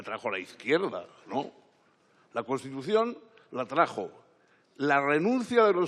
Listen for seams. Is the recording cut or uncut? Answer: uncut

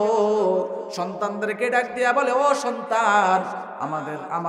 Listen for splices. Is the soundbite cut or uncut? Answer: uncut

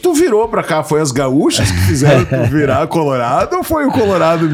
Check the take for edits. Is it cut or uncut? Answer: uncut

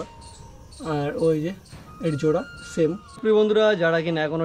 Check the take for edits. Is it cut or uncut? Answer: cut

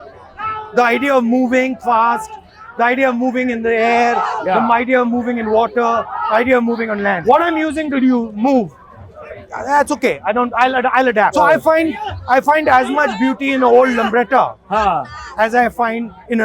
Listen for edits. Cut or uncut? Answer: cut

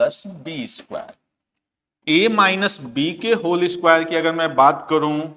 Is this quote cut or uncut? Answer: uncut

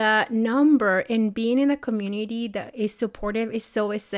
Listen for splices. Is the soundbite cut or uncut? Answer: uncut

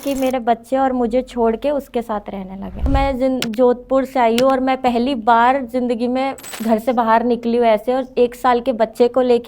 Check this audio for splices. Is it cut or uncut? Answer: cut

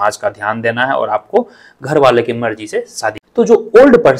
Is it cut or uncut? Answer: cut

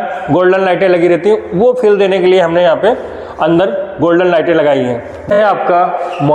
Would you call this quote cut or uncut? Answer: cut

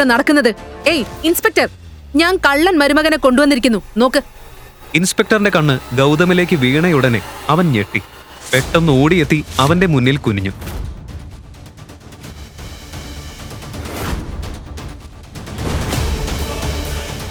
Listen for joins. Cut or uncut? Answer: uncut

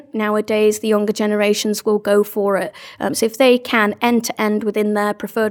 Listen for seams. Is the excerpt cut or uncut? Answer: uncut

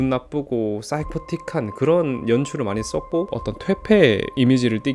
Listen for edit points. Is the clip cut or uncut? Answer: cut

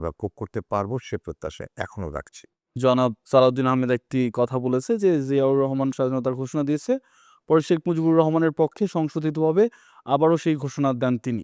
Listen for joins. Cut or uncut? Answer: cut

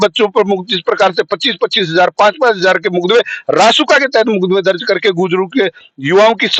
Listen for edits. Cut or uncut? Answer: uncut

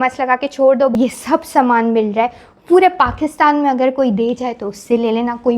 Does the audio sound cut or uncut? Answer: cut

